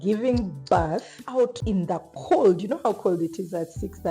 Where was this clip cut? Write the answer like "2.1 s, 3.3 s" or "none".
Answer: 1.4 s